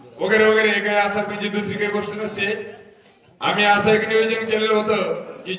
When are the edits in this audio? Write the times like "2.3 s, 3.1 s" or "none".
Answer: none